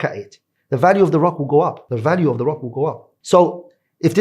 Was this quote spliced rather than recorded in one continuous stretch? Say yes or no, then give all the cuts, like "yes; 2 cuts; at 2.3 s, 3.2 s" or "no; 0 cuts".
yes; 2 cuts; at 1.8 s, 3.1 s